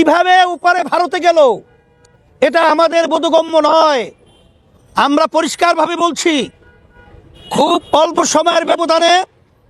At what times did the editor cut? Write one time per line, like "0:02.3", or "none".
none